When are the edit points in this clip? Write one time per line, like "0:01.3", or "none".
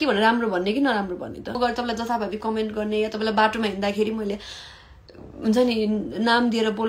0:01.6

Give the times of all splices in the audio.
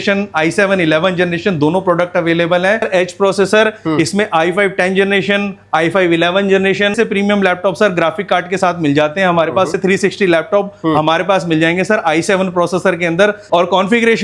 0:02.9
0:06.9
0:09.8
0:13.4

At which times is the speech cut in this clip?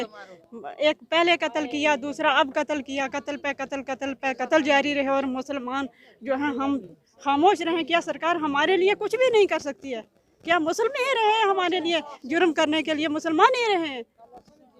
none

